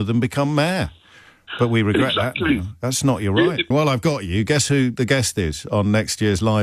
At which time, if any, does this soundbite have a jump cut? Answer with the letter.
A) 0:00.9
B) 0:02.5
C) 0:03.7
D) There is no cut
C